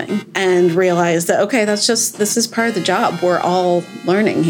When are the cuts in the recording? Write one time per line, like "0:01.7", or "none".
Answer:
none